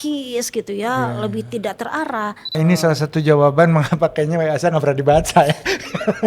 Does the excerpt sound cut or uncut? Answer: cut